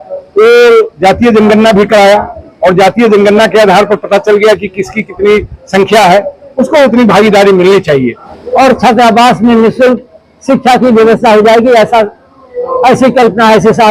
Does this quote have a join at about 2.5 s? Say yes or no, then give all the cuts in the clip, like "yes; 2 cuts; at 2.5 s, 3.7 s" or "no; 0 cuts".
no; 1 cut; at 8.3 s